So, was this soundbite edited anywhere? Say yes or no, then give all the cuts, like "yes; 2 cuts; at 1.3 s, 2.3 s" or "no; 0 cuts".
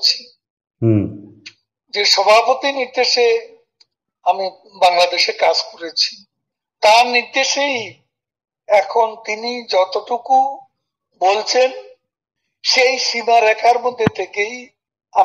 no; 0 cuts